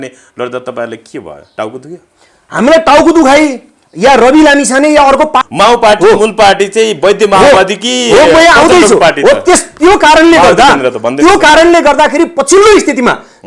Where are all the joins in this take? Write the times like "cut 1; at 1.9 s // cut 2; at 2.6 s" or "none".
cut 1; at 5.4 s